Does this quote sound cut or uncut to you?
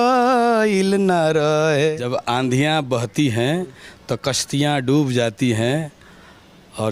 cut